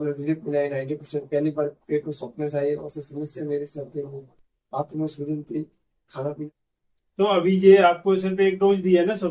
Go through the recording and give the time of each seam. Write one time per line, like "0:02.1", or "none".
0:06.4